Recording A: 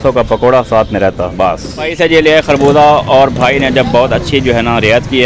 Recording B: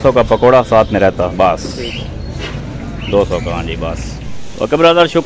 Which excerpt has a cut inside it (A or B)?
A